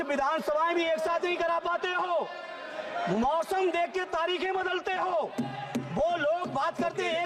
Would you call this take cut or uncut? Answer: uncut